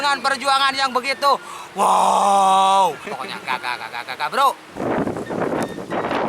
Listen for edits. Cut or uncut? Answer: uncut